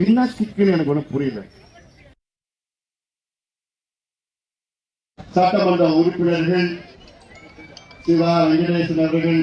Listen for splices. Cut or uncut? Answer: uncut